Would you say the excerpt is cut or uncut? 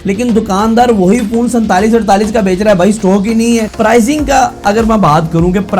cut